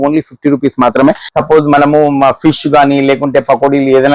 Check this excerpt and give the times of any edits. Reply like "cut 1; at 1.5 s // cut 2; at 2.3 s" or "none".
cut 1; at 1.2 s